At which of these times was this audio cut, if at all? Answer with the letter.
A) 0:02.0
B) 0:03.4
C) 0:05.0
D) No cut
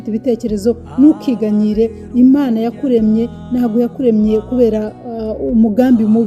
A